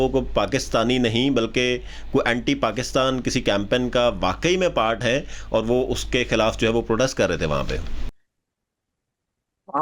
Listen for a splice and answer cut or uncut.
uncut